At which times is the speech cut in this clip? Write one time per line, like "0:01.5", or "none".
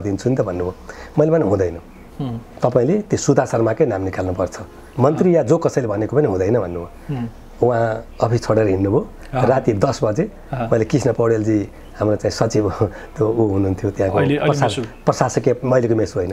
none